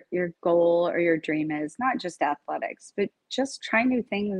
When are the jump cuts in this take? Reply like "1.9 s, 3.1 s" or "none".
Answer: none